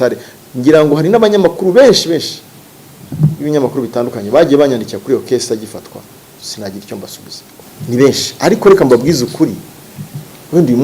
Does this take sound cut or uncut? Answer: cut